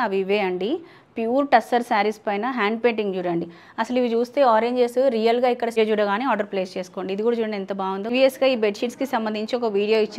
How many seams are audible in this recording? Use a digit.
2